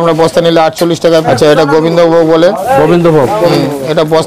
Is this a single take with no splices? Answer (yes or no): no